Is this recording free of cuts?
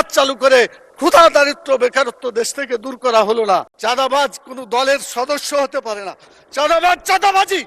no; 1 cut; at 3.7 s

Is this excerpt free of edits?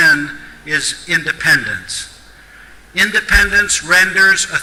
yes; 0 cuts

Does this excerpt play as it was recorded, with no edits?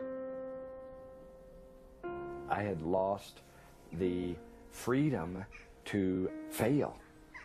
no; 1 cut; at 1.7 s

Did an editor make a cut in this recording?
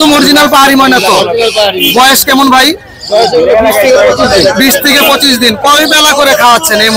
no; 0 cuts

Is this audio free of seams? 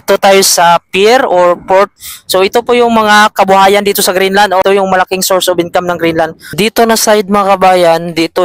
no; 3 cuts; at 1.9 s, 4.6 s, 6.5 s

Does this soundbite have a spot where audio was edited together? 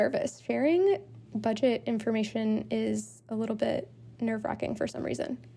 no; 0 cuts

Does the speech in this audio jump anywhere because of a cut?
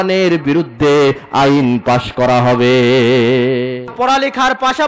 yes; 1 cut; at 3.9 s

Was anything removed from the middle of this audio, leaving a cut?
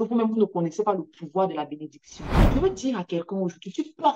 yes; 1 cut; at 2.5 s

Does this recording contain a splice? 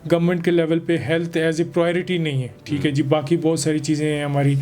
no; 0 cuts

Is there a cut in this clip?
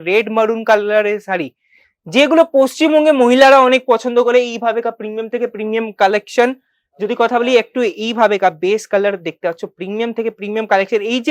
no; 0 cuts

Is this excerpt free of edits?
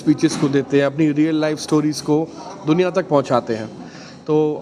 yes; 0 cuts

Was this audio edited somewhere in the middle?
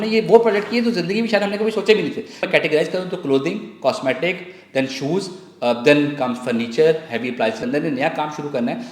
yes; 2 cuts; at 2.4 s, 7.6 s

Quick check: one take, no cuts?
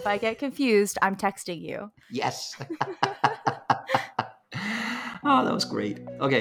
yes; 0 cuts

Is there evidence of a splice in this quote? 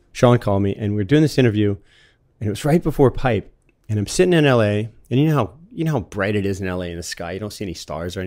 no; 0 cuts

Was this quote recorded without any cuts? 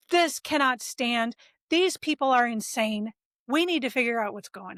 yes; 0 cuts

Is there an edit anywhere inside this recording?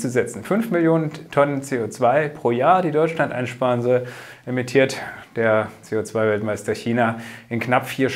no; 0 cuts

